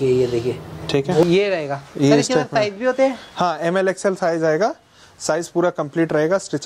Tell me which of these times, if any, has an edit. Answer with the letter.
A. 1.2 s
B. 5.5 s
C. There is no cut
A